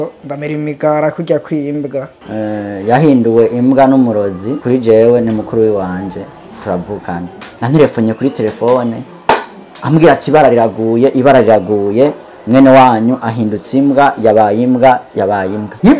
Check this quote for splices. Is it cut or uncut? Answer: cut